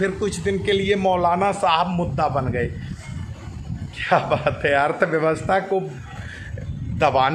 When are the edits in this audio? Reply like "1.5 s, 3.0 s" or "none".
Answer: none